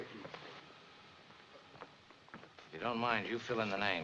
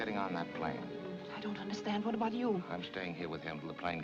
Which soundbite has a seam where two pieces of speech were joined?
second; 2 cuts; at 1.1 s, 2.9 s

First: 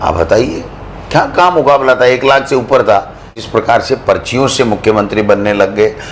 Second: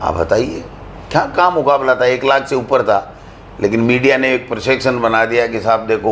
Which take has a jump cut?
first; 1 cut; at 3.4 s

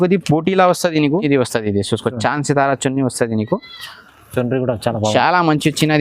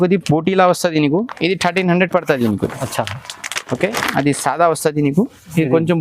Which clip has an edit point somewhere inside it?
first; 1 cut; at 1.2 s

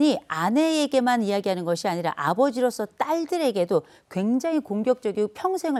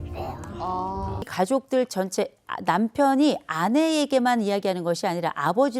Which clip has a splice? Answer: second; 1 cut; at 1.3 s

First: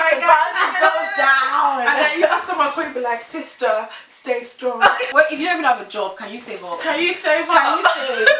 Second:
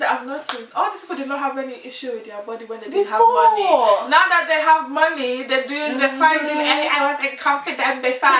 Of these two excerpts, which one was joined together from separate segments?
first; 1 cut; at 5.1 s

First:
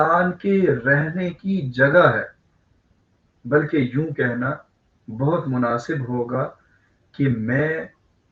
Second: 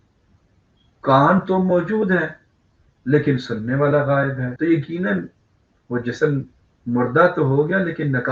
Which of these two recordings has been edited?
second; 1 cut; at 4.4 s

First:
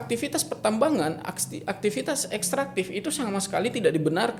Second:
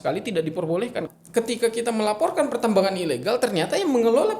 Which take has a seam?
second; 1 cut; at 1.1 s

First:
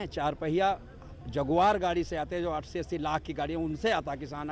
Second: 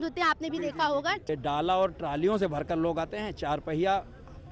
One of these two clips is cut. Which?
second; 1 cut; at 1.3 s

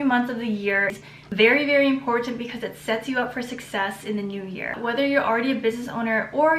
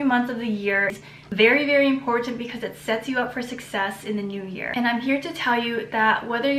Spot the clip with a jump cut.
first; 1 cut; at 4.7 s

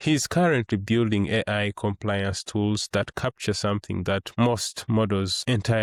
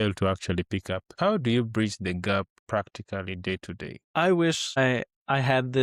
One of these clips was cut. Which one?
second; 4 cuts; at 1.1 s, 2.6 s, 3.9 s, 5.0 s

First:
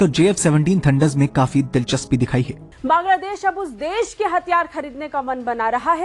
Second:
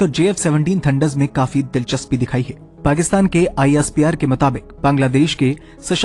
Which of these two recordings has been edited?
first; 1 cut; at 2.6 s

